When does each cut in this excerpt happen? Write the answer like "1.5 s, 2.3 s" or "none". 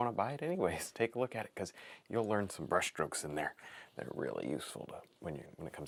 none

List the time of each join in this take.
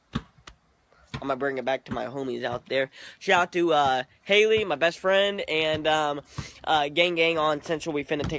4.1 s

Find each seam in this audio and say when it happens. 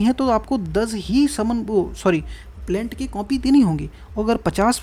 none

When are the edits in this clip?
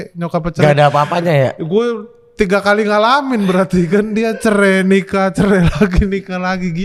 none

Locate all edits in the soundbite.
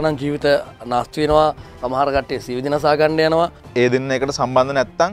3.6 s

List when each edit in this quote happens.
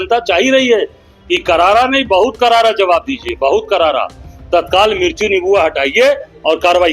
none

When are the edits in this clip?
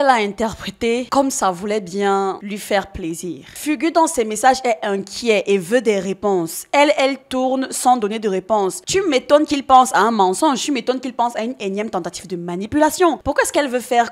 none

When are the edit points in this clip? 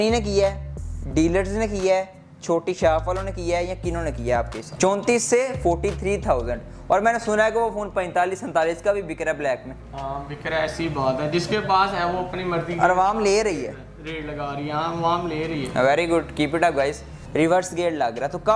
4.6 s, 17.2 s

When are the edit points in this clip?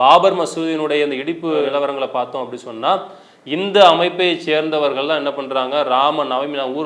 none

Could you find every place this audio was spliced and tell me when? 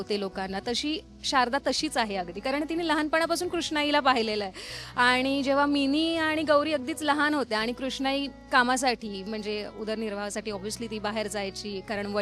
none

